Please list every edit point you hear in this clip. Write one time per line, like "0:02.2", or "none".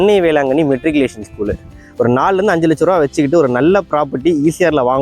0:01.7

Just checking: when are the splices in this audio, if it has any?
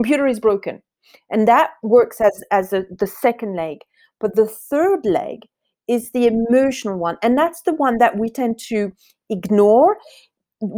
none

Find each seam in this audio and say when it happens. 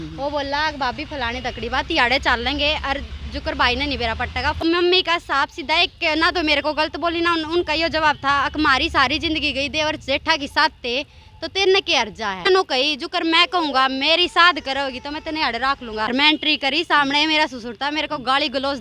0:04.6
0:12.4
0:16.1

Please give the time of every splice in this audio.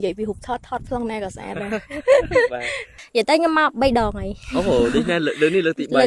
0:02.9

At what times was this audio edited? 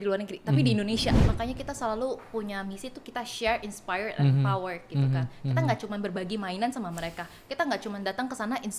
0:01.2

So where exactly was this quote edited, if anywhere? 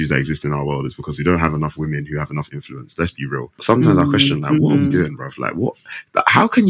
0:03.5

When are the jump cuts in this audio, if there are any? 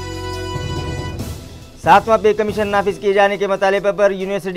0:01.3

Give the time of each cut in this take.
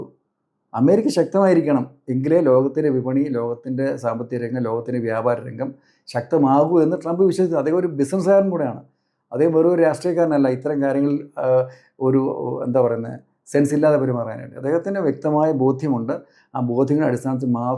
none

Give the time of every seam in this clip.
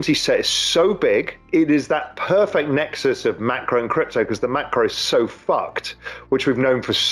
0:01.4

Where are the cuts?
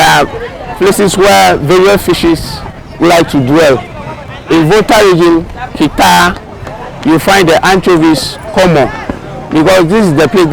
0:09.3

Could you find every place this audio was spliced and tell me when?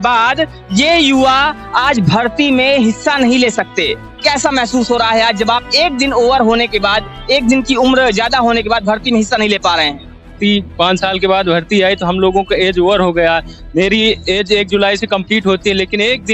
0:04.1
0:10.3

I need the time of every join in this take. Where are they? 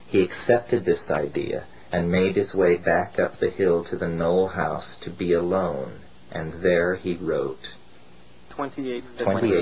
none

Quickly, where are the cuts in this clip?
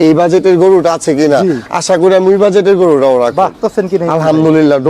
0:03.6

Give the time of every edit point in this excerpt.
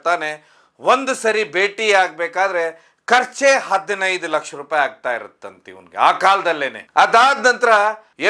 none

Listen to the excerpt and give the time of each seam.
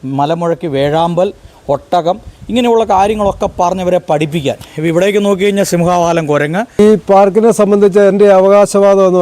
0:06.8

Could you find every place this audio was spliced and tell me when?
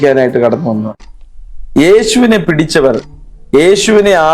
0:01.0

